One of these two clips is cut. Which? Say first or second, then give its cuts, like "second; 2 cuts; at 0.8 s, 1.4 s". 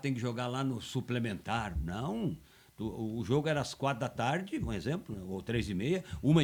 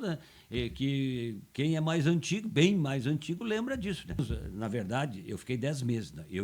second; 1 cut; at 4.2 s